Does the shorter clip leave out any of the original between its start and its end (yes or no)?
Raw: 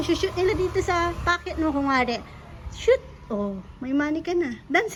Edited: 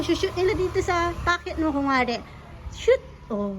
no